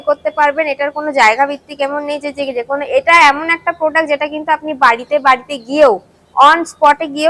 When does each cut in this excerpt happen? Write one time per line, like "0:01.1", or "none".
none